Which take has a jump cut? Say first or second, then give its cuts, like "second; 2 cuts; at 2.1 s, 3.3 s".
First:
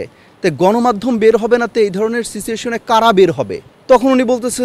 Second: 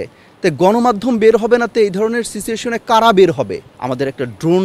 second; 1 cut; at 3.7 s